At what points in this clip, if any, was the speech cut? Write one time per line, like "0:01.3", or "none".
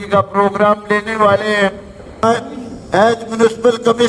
0:02.2